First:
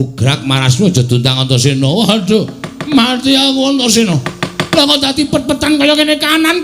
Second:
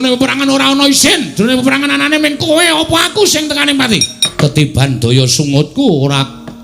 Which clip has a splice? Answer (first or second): second